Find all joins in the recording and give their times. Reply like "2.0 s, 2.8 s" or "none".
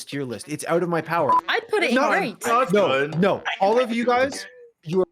1.4 s